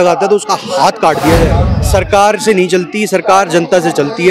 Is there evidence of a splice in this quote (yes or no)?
yes